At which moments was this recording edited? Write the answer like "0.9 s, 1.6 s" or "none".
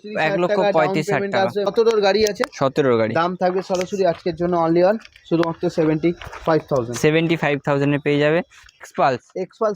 1.7 s, 8.8 s